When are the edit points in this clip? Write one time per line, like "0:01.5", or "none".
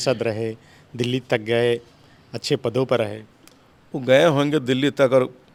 none